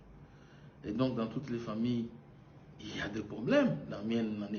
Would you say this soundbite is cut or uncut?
uncut